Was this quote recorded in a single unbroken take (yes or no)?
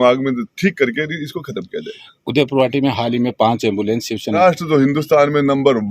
no